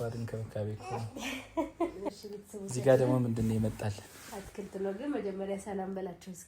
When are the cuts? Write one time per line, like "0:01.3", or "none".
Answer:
0:02.0